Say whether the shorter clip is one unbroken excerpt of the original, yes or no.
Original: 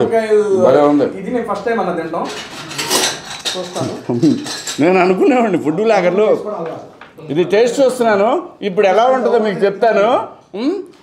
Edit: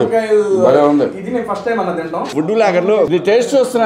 no